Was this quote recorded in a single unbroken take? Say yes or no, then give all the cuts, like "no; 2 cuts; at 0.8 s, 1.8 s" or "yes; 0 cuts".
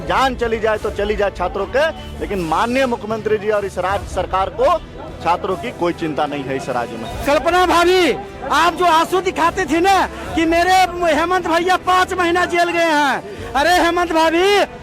no; 1 cut; at 7.1 s